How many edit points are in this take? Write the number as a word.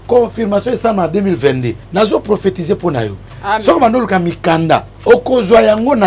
three